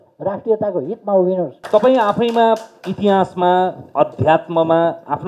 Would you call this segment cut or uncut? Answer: uncut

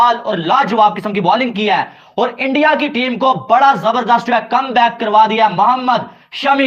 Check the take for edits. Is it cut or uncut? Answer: uncut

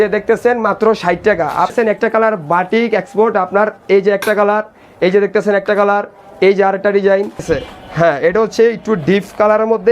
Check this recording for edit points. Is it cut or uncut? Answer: cut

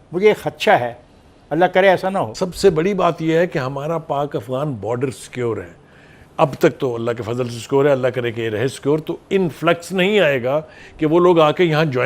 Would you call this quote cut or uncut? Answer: cut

